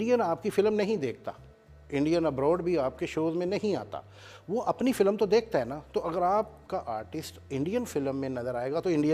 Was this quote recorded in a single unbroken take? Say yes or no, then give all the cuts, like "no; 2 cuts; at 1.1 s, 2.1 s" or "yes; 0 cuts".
yes; 0 cuts